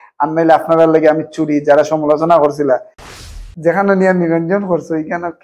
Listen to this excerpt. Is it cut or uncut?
cut